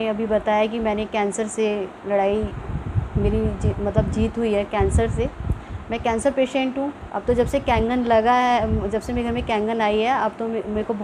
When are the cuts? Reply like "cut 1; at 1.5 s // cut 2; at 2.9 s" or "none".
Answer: cut 1; at 7.0 s